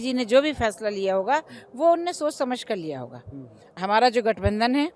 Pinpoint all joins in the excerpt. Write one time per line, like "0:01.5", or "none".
0:03.7